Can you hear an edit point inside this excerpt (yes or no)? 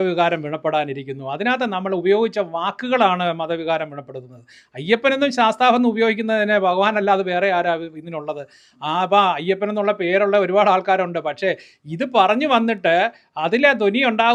no